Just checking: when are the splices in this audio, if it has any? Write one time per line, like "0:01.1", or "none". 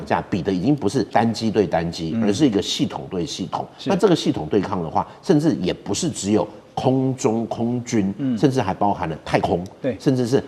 0:01.1